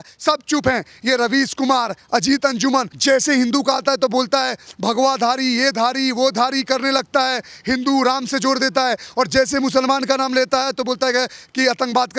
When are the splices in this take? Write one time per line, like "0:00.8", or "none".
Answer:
none